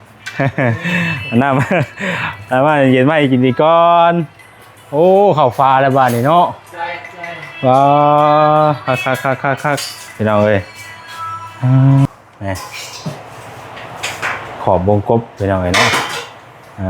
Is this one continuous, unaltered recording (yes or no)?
no